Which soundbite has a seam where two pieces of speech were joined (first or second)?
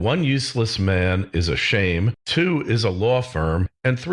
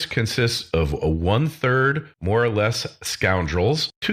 first